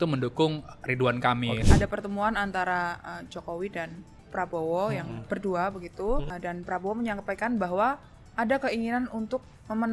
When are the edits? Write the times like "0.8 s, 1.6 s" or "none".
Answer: 1.6 s, 6.3 s